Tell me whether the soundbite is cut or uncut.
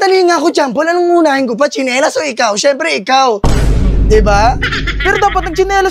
uncut